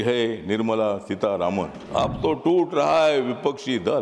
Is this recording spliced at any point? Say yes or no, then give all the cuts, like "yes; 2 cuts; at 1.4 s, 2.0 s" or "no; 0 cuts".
yes; 1 cut; at 1.8 s